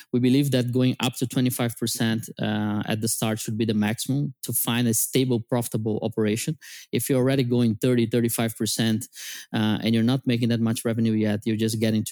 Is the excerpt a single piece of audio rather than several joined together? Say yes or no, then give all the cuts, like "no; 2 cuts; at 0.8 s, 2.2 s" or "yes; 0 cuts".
yes; 0 cuts